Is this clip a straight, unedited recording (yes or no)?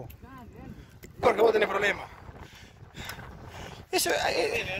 no